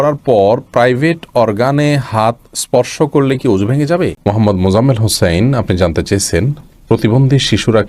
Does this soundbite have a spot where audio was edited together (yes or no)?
yes